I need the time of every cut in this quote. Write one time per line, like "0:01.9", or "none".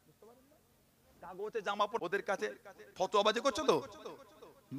0:01.7